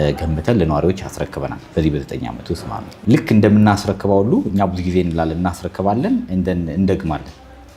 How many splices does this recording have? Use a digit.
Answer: 1